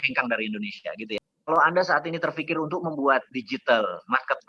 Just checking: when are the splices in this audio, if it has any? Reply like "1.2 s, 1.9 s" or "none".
1.2 s